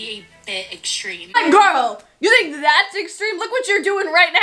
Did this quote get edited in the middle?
yes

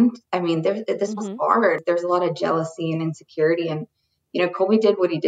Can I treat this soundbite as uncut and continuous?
no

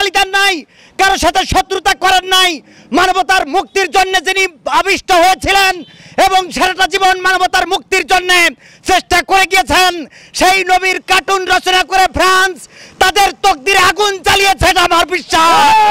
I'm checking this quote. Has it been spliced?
no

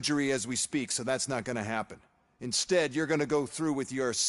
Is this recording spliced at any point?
no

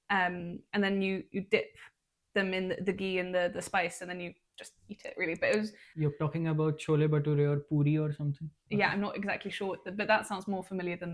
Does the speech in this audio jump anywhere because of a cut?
yes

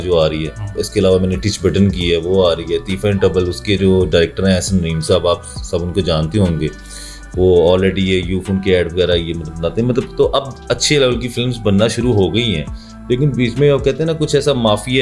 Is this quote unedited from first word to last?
yes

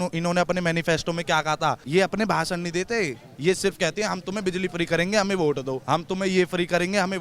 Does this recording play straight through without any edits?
no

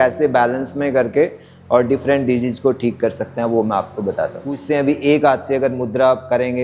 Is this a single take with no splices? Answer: no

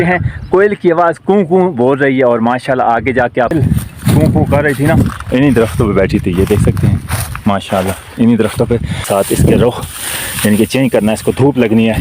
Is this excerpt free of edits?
no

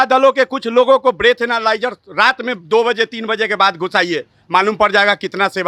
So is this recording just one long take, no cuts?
yes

